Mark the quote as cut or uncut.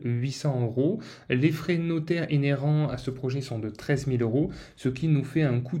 uncut